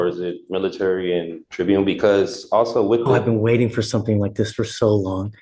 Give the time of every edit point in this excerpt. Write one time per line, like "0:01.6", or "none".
0:01.4